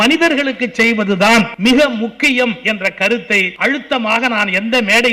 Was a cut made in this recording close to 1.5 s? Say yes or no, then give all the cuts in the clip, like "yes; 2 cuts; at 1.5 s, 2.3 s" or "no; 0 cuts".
yes; 2 cuts; at 1.5 s, 3.1 s